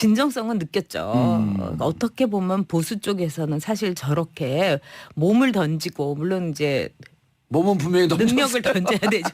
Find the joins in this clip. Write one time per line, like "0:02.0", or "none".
0:05.9